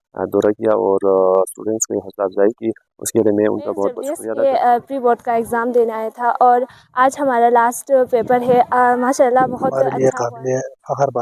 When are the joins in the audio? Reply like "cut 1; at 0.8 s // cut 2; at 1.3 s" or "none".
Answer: cut 1; at 4.1 s // cut 2; at 9.8 s